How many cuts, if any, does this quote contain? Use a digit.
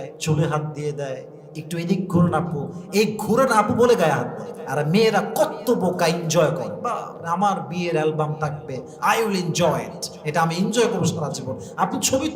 0